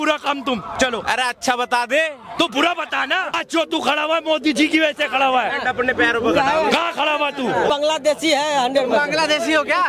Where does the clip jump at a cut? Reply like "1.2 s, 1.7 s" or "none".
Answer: 3.3 s, 7.7 s